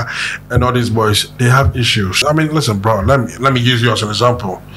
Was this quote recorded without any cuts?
no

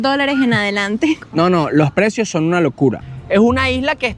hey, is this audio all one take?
no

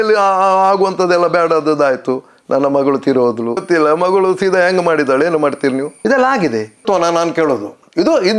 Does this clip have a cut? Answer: yes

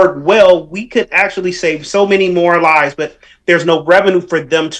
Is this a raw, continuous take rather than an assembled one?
yes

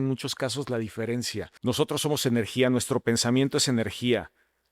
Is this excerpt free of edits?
no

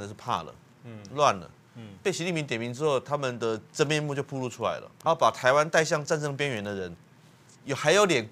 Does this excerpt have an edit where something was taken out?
yes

